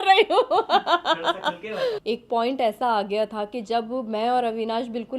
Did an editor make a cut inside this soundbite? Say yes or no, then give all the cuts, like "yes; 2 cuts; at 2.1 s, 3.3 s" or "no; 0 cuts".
yes; 1 cut; at 2.0 s